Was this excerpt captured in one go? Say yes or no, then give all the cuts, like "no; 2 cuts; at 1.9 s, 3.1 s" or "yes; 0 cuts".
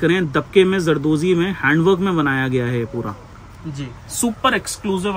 yes; 0 cuts